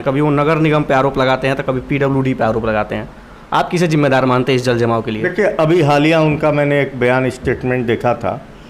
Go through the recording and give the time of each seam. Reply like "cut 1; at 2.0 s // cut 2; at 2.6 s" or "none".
none